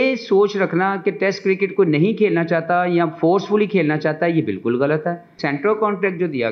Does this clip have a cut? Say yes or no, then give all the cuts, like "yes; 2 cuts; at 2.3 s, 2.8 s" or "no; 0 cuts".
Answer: yes; 1 cut; at 5.4 s